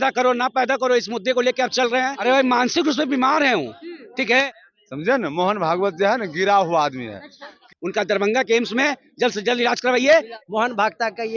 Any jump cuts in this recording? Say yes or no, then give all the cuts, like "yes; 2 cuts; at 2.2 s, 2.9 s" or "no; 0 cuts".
yes; 4 cuts; at 2.1 s, 4.5 s, 7.7 s, 10.3 s